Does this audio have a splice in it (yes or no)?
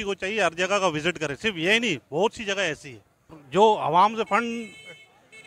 no